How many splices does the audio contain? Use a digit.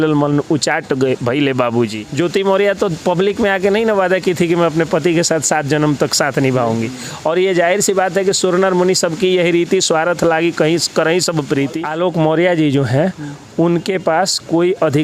2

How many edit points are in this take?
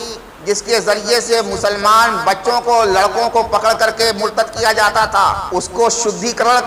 1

